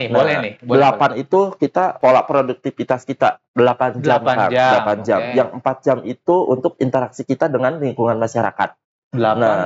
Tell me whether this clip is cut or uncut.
cut